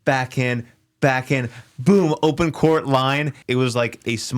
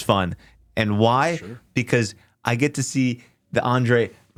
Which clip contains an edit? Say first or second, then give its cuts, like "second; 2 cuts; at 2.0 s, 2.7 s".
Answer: first; 1 cut; at 3.4 s